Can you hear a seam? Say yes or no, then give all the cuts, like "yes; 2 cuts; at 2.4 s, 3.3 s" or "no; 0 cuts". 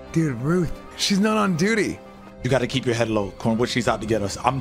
yes; 1 cut; at 2.2 s